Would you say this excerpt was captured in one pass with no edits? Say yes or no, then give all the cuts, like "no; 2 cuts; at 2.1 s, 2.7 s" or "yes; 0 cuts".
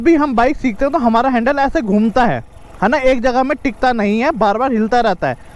yes; 0 cuts